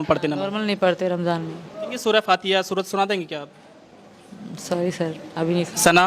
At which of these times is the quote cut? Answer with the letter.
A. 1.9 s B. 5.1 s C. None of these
A